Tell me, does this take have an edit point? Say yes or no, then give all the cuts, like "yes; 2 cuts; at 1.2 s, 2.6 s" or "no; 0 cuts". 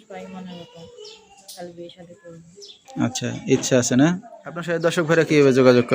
yes; 1 cut; at 4.7 s